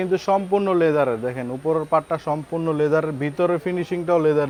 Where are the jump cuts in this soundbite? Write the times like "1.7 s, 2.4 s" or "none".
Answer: none